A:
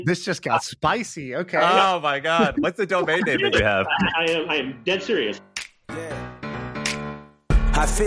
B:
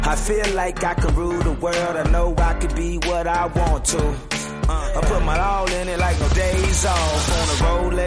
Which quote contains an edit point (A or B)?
A